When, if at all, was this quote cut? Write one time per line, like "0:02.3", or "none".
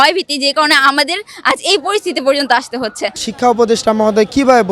0:03.2